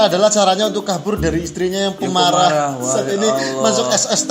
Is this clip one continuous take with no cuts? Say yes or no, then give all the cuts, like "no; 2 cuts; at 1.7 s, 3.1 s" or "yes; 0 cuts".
yes; 0 cuts